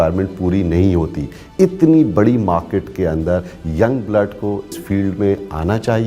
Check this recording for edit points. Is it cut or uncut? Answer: cut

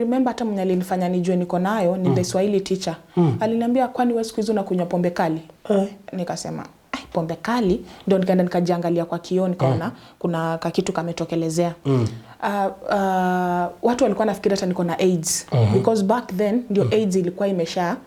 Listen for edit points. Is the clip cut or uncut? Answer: uncut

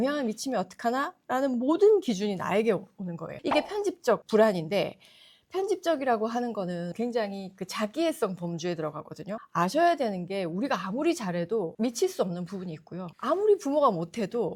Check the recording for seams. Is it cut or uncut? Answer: uncut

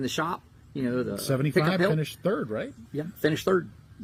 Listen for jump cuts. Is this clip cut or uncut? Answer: uncut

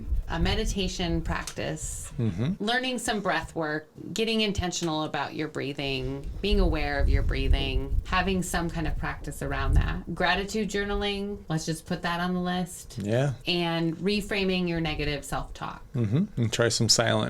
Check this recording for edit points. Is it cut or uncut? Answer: cut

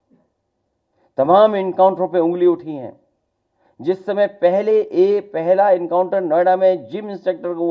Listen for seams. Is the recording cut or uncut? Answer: uncut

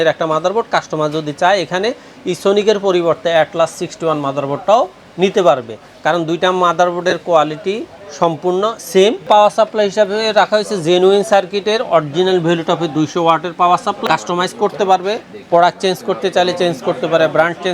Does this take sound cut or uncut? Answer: cut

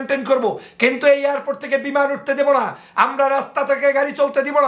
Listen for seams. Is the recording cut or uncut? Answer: uncut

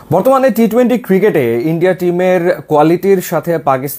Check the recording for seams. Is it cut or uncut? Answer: uncut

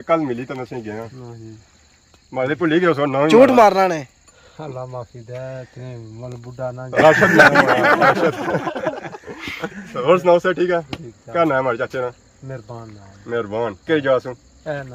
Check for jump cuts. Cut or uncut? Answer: uncut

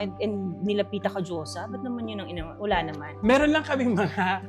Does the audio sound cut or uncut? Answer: uncut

